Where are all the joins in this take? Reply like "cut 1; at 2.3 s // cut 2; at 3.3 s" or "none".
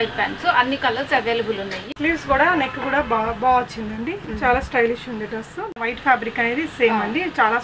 cut 1; at 1.7 s // cut 2; at 5.8 s